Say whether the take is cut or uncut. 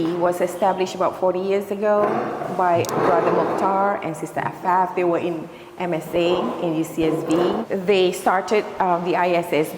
uncut